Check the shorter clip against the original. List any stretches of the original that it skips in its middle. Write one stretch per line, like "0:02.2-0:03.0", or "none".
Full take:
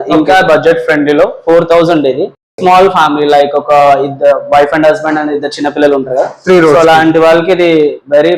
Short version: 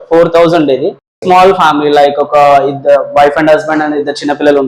none